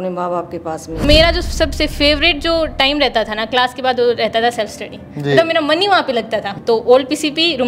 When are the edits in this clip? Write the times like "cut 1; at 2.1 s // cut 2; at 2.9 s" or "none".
cut 1; at 1.0 s